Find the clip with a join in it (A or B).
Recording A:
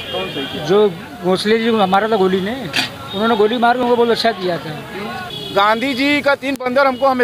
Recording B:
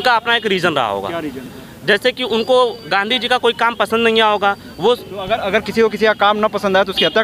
A